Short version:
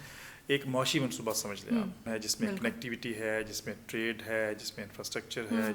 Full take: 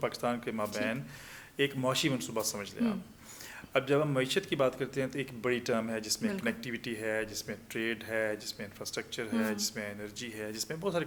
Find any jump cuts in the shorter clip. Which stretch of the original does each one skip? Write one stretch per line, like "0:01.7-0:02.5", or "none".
0:03.2-0:05.9